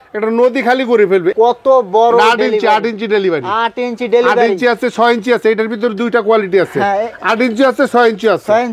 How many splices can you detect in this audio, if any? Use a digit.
0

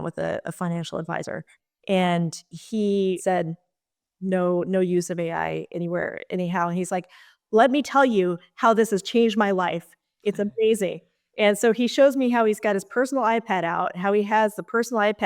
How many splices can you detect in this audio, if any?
1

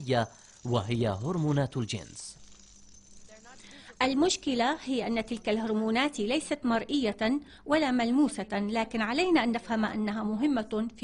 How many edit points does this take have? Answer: 0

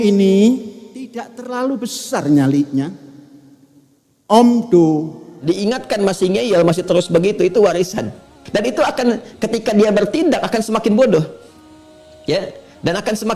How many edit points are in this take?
1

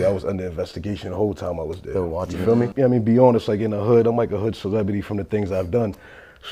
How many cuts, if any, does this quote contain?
1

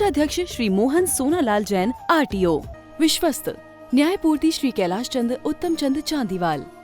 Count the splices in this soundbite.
1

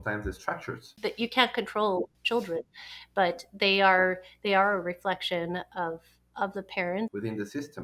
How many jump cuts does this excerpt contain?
3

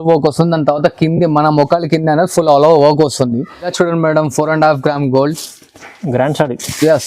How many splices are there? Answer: 1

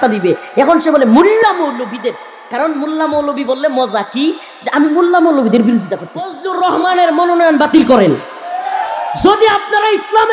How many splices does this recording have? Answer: 1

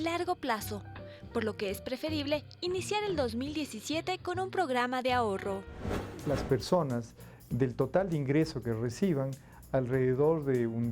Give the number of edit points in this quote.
1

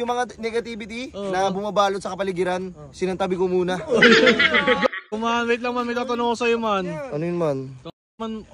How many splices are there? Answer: 1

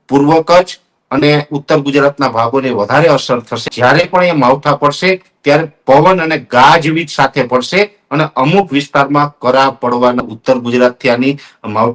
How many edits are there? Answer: 2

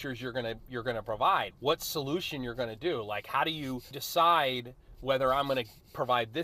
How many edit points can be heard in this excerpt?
2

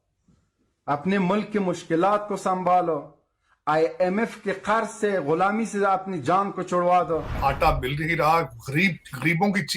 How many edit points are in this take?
1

